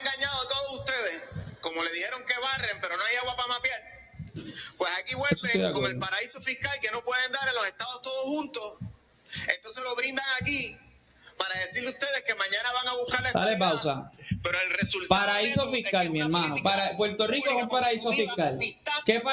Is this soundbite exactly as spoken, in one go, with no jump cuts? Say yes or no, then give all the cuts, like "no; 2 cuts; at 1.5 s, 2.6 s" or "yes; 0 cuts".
yes; 0 cuts